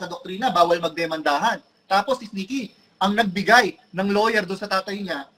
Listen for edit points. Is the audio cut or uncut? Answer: uncut